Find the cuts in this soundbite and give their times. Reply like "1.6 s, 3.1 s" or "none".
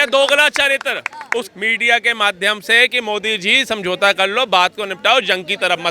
1.5 s